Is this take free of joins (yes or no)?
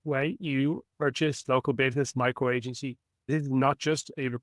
no